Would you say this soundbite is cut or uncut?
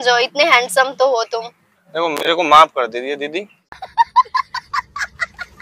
cut